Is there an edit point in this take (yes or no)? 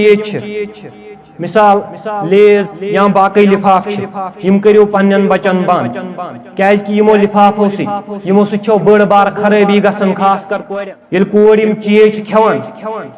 yes